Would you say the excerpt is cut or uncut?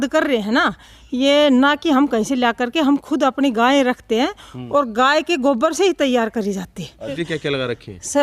cut